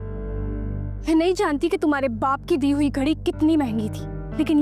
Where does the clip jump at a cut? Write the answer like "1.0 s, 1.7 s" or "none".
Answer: 1.0 s